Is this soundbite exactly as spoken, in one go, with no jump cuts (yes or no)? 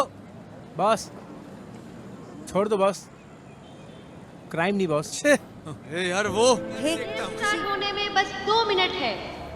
no